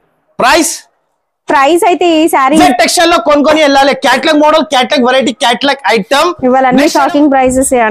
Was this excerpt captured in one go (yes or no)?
no